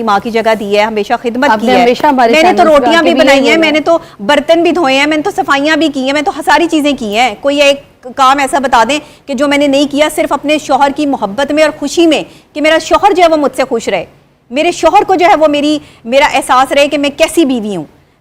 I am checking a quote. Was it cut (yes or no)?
no